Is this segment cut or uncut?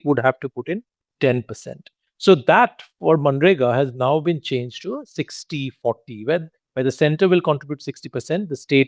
cut